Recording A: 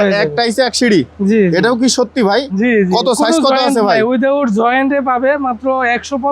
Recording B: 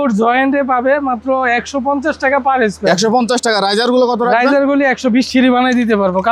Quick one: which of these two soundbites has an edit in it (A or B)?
B